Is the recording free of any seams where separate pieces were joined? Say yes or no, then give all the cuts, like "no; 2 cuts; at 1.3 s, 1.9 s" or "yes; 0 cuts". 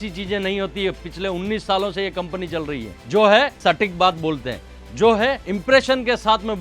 no; 3 cuts; at 2.9 s, 3.5 s, 5.5 s